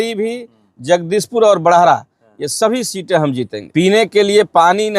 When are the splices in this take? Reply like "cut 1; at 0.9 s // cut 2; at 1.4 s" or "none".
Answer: cut 1; at 3.5 s